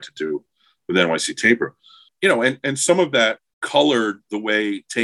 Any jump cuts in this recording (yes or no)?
yes